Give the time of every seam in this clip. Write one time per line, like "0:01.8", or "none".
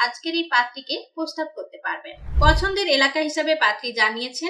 0:02.2